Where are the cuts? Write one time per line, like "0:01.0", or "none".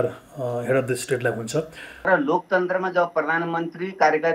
0:02.1